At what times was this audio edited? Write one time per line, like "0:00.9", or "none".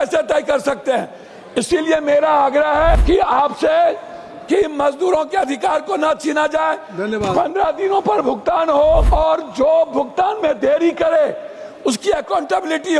0:03.0
0:09.1